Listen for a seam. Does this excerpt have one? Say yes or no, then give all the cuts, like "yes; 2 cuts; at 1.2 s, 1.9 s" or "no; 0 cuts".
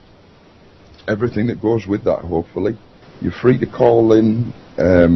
no; 0 cuts